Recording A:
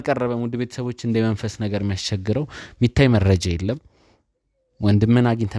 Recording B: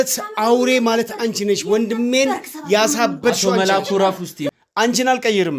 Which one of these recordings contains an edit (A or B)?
B